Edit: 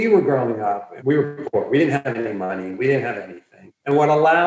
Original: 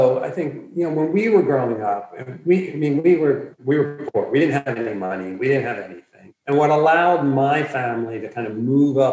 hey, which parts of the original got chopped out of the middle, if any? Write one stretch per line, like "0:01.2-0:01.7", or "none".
0:02.1-0:03.5